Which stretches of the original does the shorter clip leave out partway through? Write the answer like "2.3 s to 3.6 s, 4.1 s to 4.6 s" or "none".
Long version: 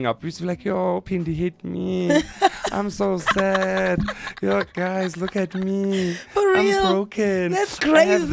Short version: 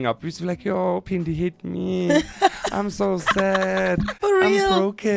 4.1 s to 6.3 s